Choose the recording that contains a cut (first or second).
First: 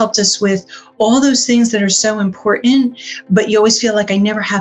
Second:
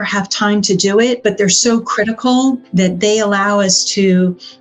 second